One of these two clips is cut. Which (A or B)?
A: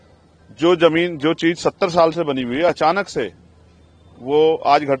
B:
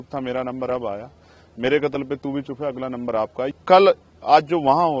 B